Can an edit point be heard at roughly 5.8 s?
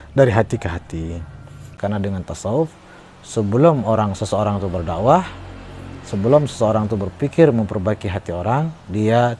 no; 1 cut; at 1.7 s

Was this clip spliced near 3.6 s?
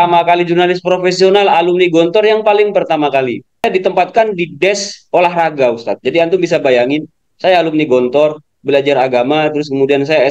yes; 1 cut; at 3.6 s

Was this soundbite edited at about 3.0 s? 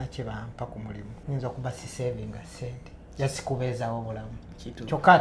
no; 1 cut; at 1.1 s

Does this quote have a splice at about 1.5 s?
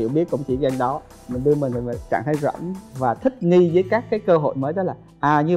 no; 1 cut; at 2.7 s

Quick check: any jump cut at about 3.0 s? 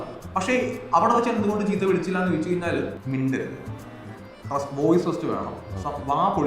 yes; 1 cut; at 3.0 s

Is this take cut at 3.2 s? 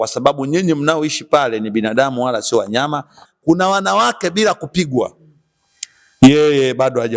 yes; 1 cut; at 3.2 s

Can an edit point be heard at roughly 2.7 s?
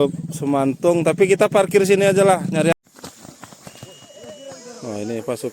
yes; 1 cut; at 2.7 s

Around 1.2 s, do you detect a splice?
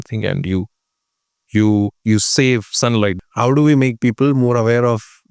no; 1 cut; at 3.1 s

